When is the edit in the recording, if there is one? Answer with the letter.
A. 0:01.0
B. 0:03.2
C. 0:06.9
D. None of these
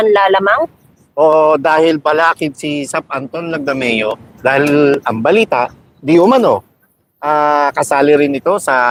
D